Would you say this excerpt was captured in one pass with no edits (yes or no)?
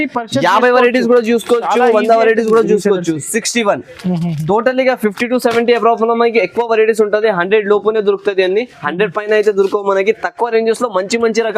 yes